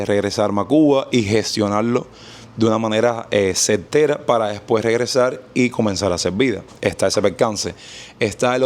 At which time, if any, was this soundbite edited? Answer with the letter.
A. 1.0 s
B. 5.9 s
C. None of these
C